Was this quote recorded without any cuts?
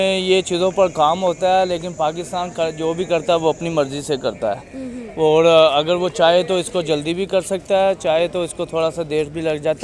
yes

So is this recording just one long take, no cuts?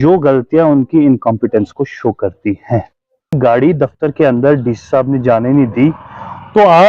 no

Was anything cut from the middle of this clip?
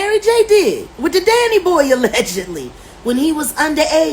yes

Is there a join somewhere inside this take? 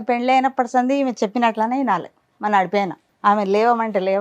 yes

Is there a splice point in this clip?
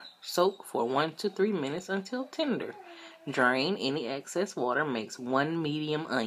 yes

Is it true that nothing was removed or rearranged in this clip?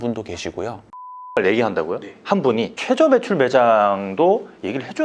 no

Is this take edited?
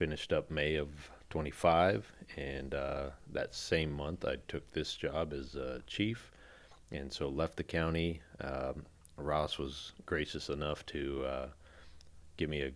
no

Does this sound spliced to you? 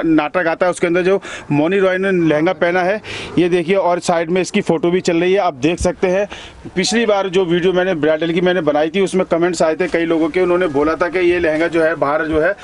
no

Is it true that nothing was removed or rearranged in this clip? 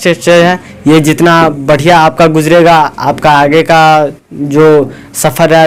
yes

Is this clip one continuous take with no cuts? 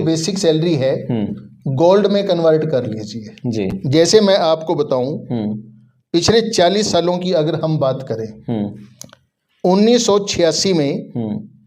yes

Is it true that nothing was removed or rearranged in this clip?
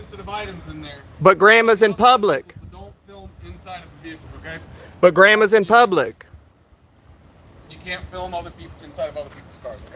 yes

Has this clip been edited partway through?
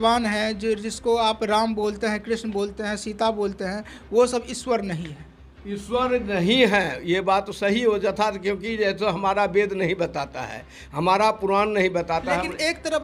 no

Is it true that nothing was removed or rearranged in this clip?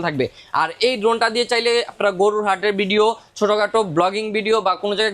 yes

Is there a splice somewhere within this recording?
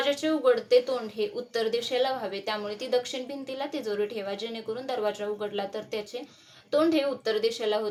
no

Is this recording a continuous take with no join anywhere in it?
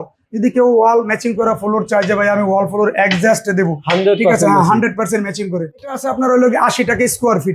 no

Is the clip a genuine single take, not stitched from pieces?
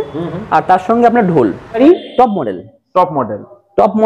no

